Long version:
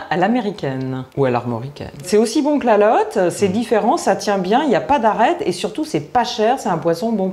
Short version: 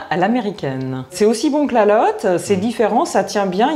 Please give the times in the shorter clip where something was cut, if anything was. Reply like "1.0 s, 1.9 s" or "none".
1.0 s